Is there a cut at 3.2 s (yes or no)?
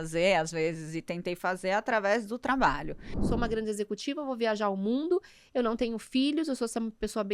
yes